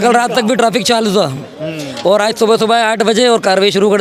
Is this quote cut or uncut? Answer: uncut